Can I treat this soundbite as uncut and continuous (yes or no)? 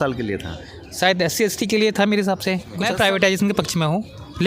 no